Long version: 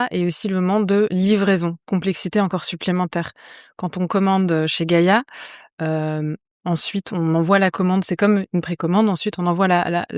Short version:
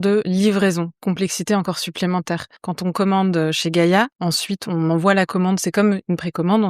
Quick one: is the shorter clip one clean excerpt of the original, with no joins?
no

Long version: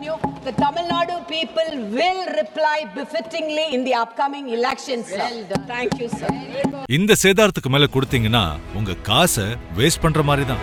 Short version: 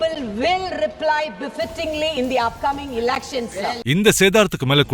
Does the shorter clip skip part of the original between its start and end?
yes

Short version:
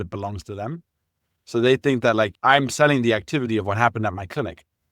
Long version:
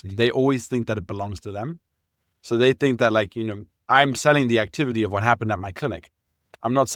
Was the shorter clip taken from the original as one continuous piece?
no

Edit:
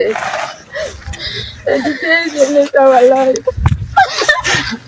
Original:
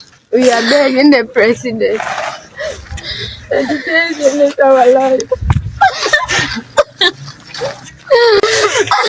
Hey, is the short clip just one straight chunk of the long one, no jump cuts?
yes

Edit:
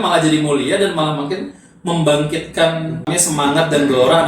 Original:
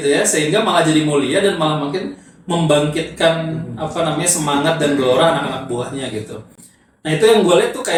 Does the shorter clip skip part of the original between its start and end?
yes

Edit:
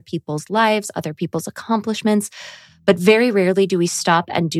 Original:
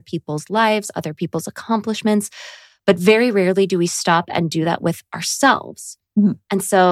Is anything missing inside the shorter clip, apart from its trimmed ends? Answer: no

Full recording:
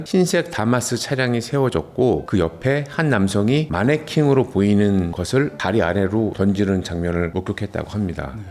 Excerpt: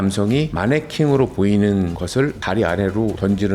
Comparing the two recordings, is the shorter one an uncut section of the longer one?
yes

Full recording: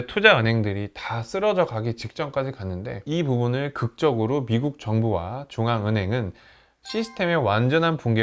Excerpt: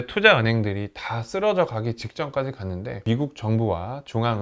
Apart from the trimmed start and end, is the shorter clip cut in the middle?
yes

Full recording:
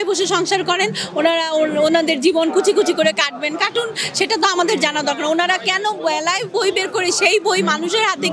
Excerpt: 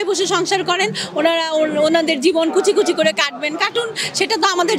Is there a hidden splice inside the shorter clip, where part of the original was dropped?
no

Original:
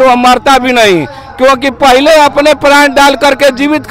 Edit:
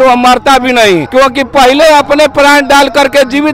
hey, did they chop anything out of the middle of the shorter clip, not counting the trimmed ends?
yes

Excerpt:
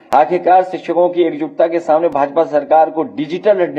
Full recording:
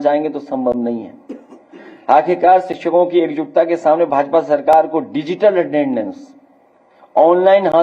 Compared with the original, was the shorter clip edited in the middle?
no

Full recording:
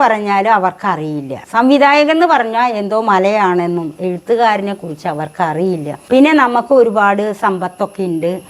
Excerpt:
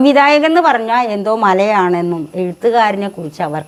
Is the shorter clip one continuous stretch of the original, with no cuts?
yes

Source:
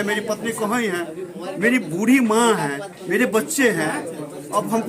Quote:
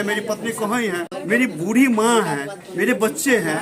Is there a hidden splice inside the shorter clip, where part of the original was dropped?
yes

